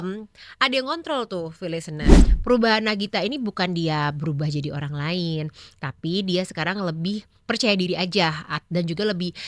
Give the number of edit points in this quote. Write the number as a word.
one